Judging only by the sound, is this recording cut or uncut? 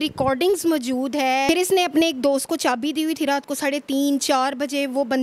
cut